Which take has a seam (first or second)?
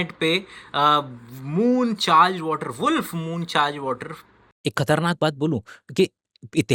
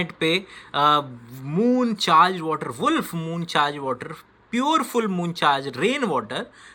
first